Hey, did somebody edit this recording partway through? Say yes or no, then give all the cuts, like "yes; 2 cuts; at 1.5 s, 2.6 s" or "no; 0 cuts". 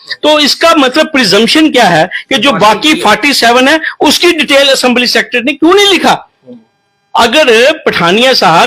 no; 0 cuts